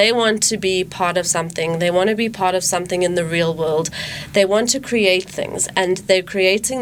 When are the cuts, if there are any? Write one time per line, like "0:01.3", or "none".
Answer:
none